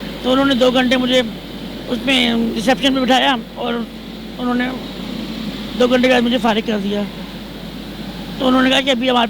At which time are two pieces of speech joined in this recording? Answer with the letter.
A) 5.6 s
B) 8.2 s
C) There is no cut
C